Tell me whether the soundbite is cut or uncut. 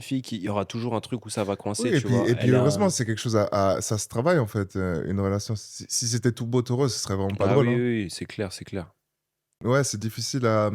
cut